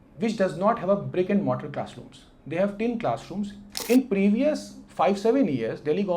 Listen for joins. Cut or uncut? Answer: cut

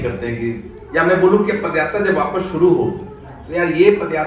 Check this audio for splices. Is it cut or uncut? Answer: uncut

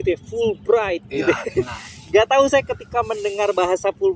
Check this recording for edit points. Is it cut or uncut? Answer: uncut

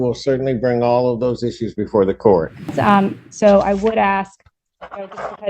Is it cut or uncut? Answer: cut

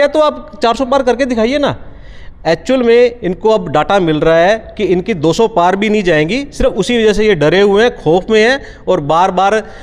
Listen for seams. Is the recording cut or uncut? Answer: uncut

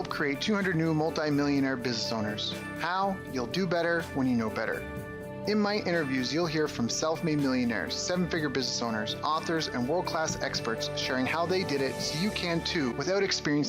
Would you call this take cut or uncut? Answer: uncut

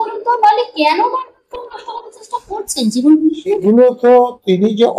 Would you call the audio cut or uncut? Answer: cut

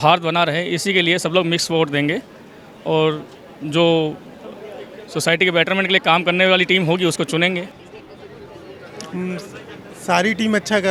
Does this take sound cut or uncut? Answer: uncut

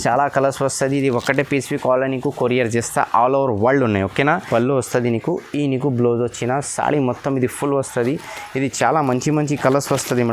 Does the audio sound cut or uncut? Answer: cut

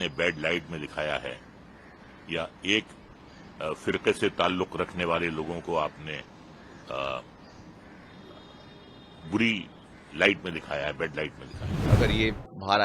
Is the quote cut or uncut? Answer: cut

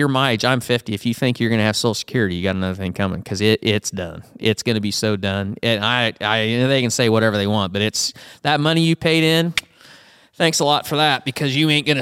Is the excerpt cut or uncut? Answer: uncut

